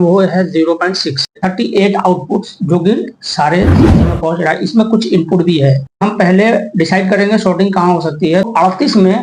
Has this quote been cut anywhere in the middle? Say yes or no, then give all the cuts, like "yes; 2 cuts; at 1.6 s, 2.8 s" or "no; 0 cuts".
yes; 3 cuts; at 1.4 s, 6.0 s, 8.5 s